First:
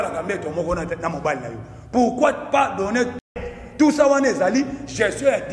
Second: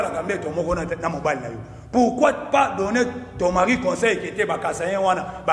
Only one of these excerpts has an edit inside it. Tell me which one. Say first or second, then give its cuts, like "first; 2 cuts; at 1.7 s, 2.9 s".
first; 1 cut; at 3.3 s